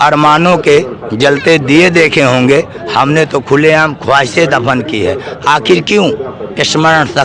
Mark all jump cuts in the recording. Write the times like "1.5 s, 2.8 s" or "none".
none